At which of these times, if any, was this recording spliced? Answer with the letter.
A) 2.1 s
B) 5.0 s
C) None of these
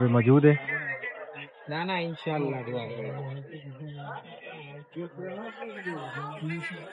C